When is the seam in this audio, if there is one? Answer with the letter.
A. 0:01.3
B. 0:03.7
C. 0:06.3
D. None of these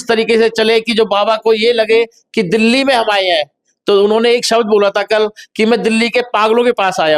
D